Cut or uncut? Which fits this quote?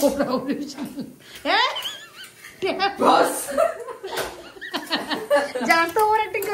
uncut